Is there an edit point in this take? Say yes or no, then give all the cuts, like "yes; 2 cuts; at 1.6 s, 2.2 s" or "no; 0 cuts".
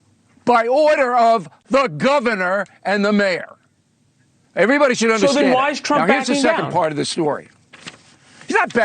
yes; 1 cut; at 4.0 s